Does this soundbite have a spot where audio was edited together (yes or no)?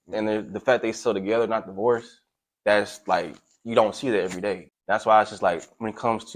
yes